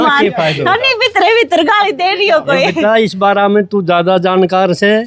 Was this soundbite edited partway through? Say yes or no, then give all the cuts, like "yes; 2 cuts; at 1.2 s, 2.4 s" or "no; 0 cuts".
no; 0 cuts